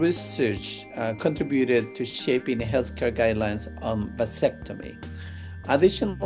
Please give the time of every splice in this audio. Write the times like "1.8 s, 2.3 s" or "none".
none